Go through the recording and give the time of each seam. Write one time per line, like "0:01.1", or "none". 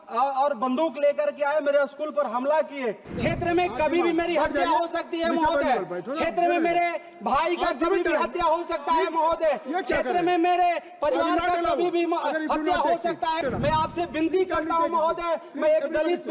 0:03.1
0:13.4